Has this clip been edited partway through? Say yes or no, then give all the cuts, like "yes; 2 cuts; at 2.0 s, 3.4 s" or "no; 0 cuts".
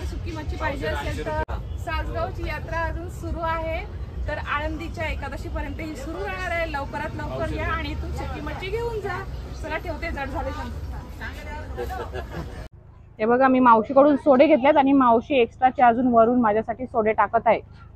yes; 2 cuts; at 1.5 s, 12.6 s